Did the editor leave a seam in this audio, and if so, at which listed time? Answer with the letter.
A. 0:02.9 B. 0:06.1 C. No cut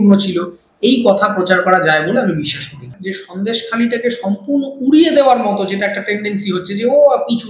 A